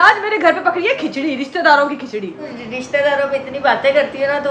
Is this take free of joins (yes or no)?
yes